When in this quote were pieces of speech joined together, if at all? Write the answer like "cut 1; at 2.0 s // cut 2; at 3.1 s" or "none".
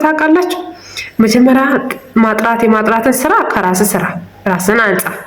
none